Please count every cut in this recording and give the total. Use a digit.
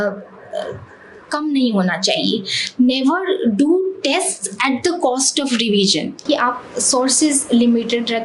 1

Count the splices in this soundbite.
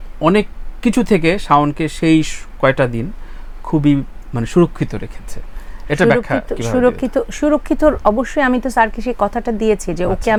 0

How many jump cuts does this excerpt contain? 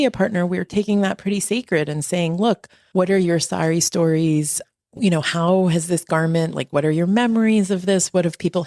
1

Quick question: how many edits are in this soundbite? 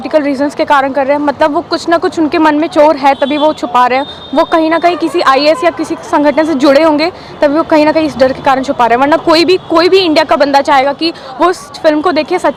0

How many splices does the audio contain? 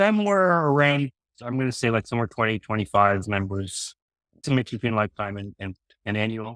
1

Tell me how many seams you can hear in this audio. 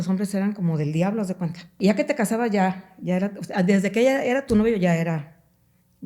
1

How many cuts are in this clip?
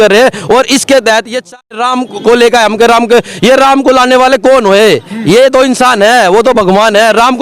1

